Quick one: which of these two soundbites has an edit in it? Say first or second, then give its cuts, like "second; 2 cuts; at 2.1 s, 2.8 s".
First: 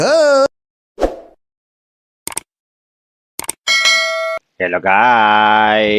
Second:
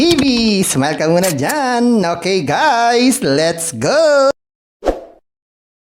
first; 1 cut; at 4.3 s